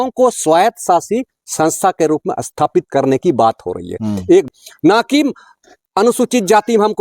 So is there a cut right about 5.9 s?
no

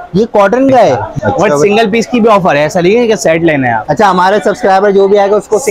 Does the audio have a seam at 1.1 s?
yes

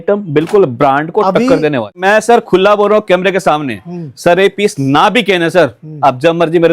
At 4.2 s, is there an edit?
no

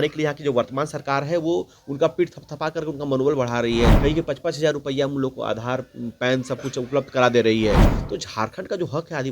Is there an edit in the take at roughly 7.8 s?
yes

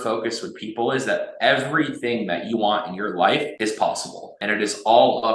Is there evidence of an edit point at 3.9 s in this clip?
yes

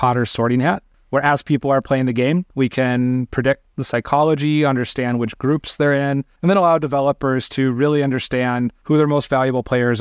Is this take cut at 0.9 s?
yes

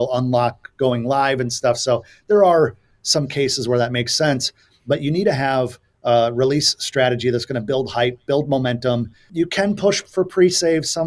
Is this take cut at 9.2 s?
yes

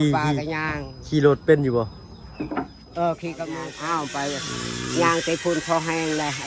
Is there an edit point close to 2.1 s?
no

